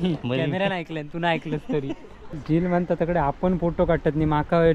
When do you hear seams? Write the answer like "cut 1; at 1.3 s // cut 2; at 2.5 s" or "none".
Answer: cut 1; at 2.3 s